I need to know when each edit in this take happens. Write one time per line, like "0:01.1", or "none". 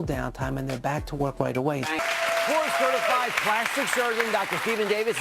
0:02.0